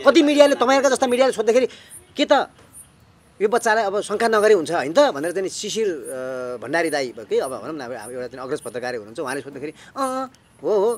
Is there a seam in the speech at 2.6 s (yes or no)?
no